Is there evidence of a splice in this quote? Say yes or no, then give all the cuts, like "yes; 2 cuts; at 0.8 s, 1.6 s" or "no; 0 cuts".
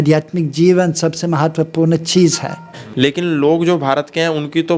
yes; 1 cut; at 2.8 s